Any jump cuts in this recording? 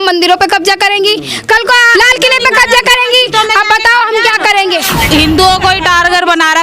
yes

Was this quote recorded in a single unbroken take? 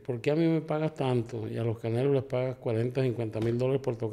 yes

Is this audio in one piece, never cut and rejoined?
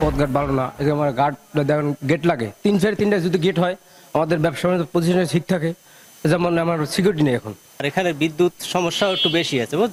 yes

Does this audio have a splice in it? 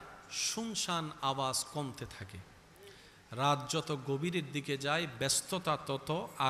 no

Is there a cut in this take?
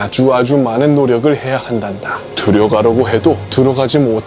no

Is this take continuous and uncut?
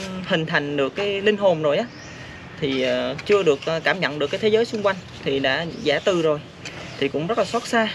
yes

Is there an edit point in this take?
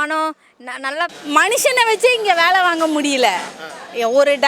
yes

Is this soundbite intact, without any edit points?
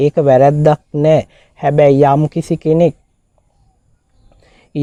yes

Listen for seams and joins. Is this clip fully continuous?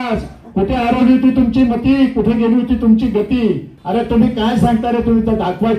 no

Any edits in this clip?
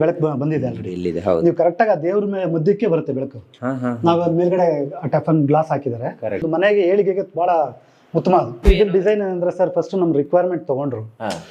yes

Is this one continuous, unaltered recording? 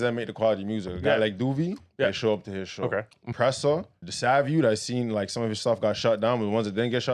no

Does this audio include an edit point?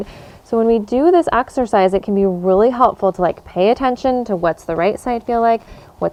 no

